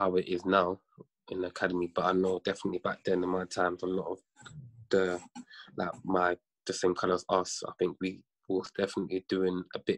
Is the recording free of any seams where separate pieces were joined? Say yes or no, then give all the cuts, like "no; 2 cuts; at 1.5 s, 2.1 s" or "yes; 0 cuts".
yes; 0 cuts